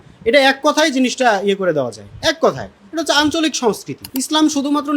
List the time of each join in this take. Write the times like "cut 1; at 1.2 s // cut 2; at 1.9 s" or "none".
cut 1; at 3.9 s